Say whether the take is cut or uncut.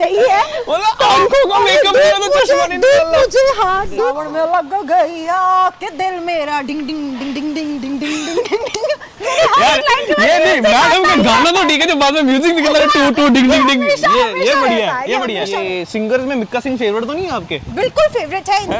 cut